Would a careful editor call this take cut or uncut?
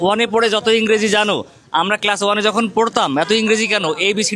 uncut